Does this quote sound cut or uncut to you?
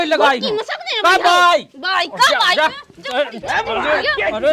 uncut